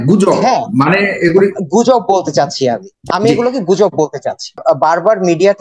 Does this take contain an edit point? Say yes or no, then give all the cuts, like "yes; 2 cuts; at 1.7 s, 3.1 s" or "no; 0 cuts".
yes; 2 cuts; at 2.9 s, 4.6 s